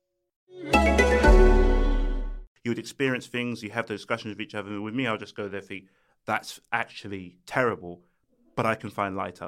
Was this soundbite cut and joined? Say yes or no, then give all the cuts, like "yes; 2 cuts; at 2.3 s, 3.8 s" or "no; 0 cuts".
yes; 1 cut; at 2.4 s